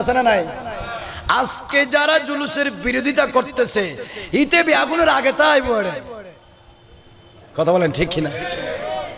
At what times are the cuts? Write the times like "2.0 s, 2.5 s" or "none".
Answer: none